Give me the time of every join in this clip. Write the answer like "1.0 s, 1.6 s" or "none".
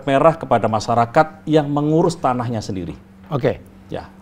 none